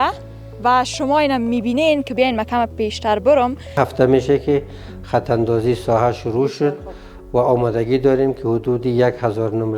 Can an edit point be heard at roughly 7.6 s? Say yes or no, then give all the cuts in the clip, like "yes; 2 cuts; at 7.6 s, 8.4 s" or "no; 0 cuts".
no; 1 cut; at 3.8 s